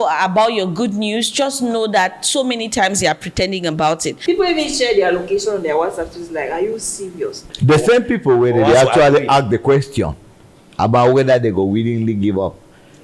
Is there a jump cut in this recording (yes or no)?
yes